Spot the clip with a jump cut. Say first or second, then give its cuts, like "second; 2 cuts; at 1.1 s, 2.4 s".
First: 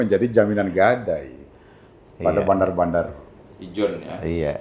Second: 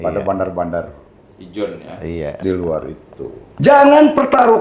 second; 1 cut; at 3.5 s